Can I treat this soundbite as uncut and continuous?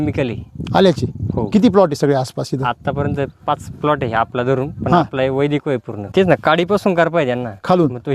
no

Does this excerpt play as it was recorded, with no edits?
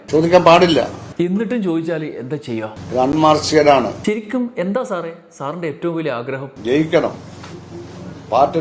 no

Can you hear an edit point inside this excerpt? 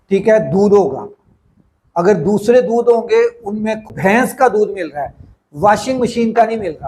yes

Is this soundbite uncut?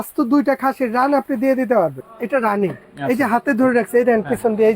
no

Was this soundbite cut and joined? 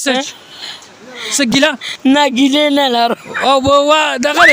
yes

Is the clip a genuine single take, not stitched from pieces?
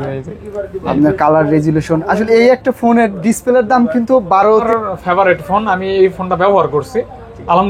no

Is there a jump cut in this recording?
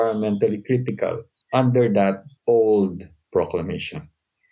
yes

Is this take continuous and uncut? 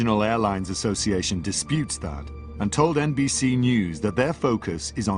no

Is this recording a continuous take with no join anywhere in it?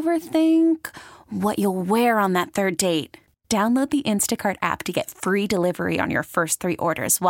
yes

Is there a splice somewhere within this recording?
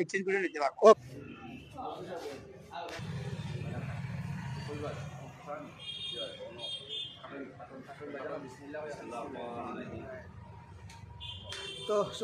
yes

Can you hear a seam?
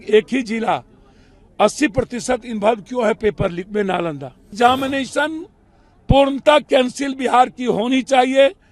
yes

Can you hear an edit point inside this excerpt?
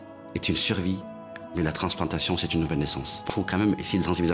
yes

